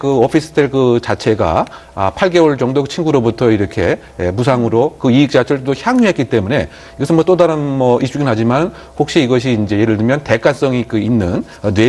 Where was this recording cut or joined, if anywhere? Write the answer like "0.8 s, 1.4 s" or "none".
none